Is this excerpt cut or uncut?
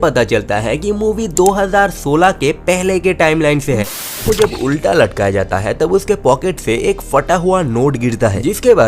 cut